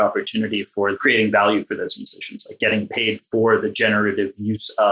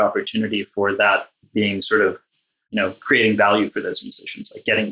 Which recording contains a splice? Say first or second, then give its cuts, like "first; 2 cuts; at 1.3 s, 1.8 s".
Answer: first; 1 cut; at 0.9 s